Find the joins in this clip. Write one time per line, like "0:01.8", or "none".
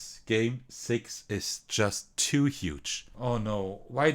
0:03.1